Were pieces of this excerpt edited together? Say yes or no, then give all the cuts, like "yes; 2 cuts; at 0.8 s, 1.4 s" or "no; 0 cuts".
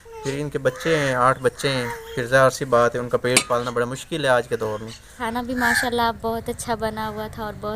yes; 1 cut; at 5.2 s